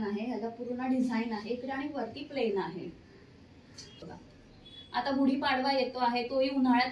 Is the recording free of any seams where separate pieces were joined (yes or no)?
no